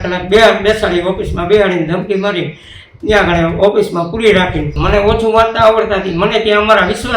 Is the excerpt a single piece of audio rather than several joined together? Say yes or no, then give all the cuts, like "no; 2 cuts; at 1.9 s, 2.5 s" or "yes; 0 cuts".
no; 1 cut; at 4.7 s